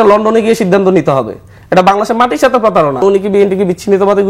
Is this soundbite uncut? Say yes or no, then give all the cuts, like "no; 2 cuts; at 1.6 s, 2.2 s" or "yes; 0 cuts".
no; 1 cut; at 3.0 s